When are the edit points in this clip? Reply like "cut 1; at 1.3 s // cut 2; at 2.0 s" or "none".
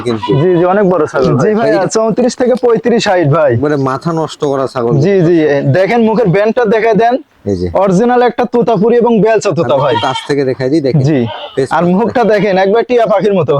cut 1; at 1.4 s